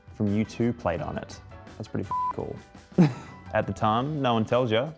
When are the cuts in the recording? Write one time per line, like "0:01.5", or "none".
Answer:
0:03.3